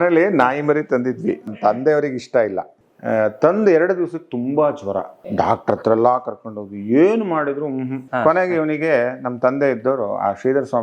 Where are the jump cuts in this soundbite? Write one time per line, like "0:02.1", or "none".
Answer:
0:01.5
0:02.7
0:05.3
0:08.1